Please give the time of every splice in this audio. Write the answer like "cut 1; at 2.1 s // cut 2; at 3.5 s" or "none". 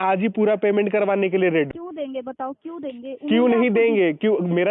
cut 1; at 1.7 s